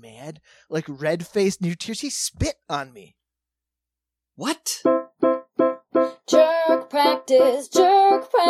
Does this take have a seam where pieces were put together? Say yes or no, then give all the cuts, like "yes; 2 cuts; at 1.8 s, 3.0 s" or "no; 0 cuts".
yes; 1 cut; at 4.7 s